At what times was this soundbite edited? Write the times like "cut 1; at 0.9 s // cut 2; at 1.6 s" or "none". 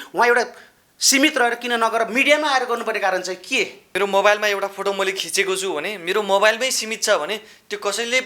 cut 1; at 3.8 s